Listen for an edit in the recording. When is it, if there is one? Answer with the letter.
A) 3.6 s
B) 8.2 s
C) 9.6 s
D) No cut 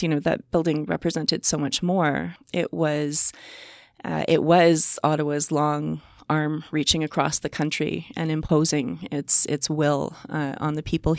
D